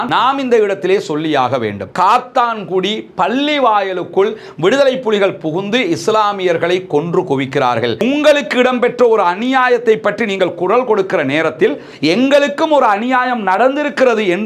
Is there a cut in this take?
yes; 2 cuts; at 1.9 s, 8.0 s

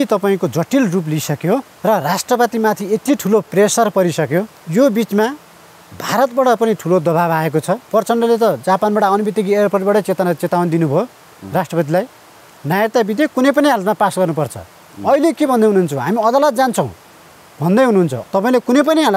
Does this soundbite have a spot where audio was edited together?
yes; 4 cuts; at 1.7 s, 4.6 s, 7.9 s, 18.2 s

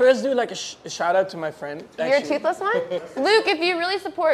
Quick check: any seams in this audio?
yes; 2 cuts; at 1.9 s, 3.0 s

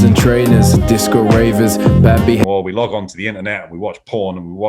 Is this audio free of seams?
no; 1 cut; at 2.5 s

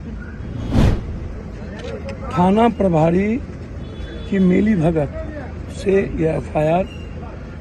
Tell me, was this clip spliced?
no; 0 cuts

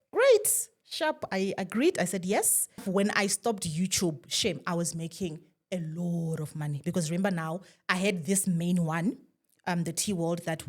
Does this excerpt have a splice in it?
yes; 1 cut; at 2.9 s

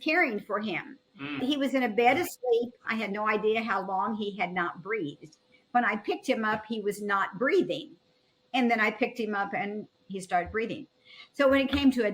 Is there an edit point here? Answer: yes; 3 cuts; at 1.4 s, 2.8 s, 10.1 s

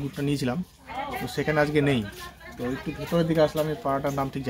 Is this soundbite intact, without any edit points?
yes; 0 cuts

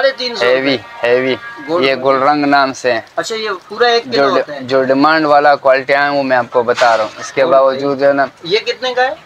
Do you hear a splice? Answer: no; 0 cuts

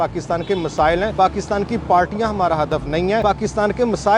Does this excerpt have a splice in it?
yes; 2 cuts; at 1.1 s, 3.2 s

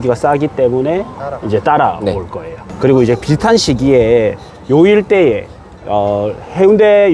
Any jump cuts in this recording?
no; 0 cuts

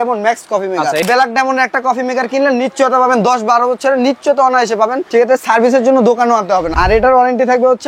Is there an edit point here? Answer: yes; 2 cuts; at 1.0 s, 6.7 s

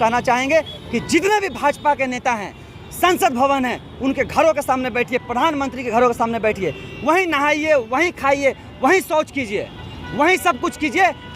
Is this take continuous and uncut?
yes; 0 cuts

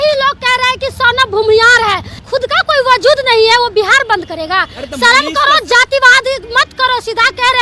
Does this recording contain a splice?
yes; 1 cut; at 2.1 s

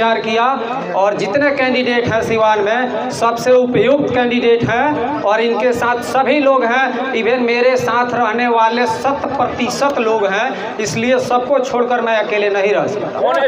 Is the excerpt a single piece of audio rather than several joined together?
yes; 0 cuts

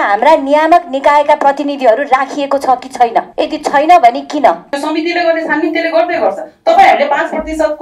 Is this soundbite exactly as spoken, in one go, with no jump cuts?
no; 2 cuts; at 3.3 s, 4.7 s

